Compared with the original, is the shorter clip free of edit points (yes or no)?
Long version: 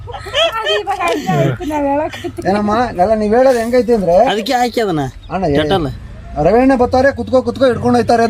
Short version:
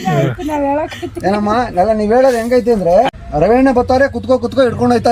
no